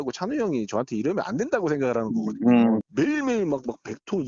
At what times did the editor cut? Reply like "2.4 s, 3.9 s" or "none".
2.8 s